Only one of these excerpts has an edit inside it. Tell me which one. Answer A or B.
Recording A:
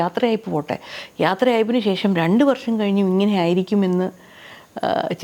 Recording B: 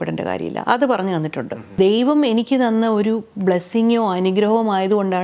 B